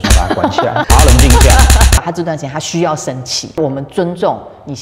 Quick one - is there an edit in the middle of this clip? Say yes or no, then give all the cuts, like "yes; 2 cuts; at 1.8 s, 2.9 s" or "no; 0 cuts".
yes; 2 cuts; at 2.0 s, 3.6 s